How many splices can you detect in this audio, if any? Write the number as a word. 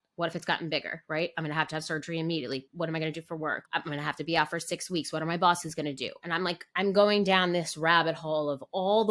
two